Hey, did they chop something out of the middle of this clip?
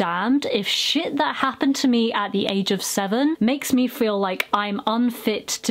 no; 0 cuts

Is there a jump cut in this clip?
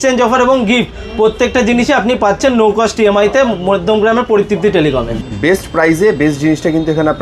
yes; 1 cut; at 5.1 s

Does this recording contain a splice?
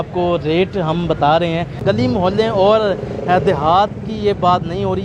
yes; 1 cut; at 1.8 s

